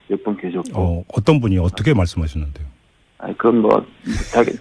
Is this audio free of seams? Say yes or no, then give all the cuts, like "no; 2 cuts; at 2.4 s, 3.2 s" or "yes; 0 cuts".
yes; 0 cuts